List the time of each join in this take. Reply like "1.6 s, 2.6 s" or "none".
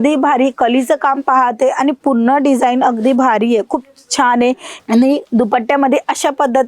4.7 s

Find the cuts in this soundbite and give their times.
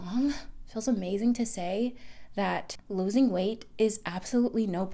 2.8 s

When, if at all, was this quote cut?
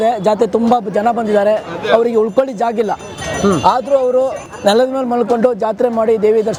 none

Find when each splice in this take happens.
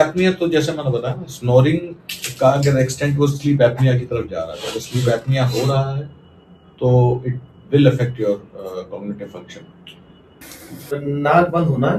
11.0 s

